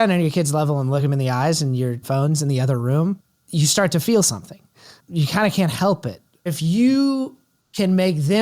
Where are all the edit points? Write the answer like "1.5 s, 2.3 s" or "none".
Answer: 1.0 s, 2.0 s, 3.3 s, 6.4 s